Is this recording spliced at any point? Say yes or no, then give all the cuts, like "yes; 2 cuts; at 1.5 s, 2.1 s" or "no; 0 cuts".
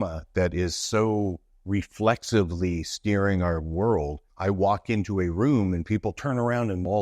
yes; 1 cut; at 4.3 s